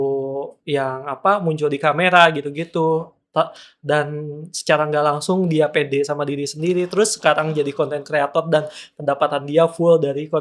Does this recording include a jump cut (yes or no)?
no